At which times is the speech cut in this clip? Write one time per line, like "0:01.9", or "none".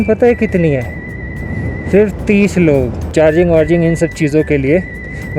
0:03.0

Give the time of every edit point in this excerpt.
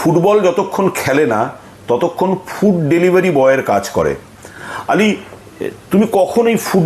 none

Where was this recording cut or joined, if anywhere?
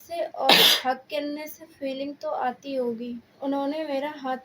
0:03.3

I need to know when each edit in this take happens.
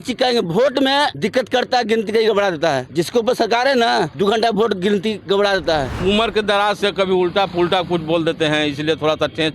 0:01.1
0:02.8
0:04.1
0:05.9

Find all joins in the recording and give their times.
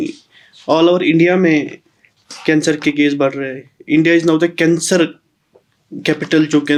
none

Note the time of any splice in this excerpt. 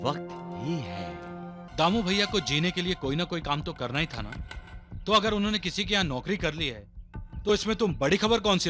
0:01.6

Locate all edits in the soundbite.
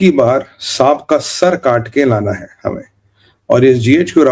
none

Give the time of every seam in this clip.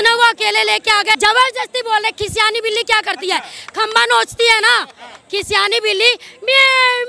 0:01.2

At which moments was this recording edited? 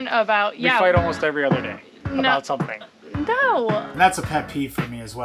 0:03.9

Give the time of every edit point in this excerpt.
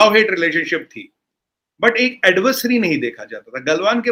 none

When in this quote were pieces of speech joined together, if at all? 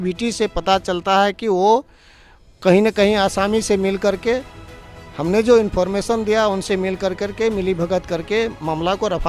none

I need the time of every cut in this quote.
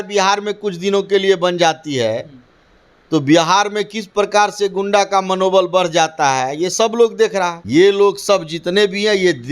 0:07.6

